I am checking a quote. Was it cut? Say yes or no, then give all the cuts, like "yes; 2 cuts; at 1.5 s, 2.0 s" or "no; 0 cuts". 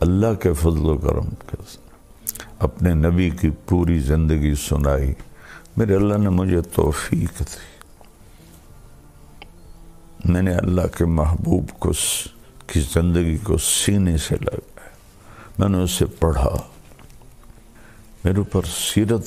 no; 0 cuts